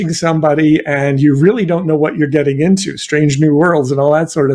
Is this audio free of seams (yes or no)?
yes